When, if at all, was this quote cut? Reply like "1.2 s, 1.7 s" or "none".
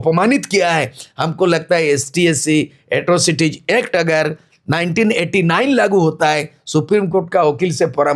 none